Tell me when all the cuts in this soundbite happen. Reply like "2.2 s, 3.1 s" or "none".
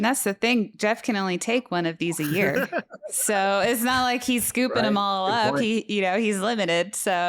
none